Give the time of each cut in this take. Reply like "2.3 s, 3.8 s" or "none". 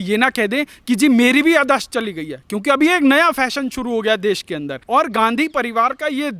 4.7 s